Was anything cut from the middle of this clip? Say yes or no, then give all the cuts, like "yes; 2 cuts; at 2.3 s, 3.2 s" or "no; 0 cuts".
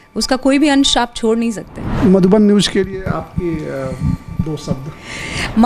yes; 1 cut; at 2.0 s